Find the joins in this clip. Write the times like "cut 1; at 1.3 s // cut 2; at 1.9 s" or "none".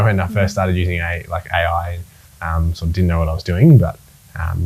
none